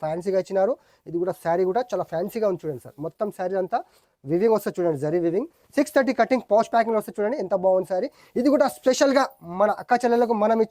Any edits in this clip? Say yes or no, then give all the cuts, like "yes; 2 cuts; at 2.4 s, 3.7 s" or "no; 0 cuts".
no; 0 cuts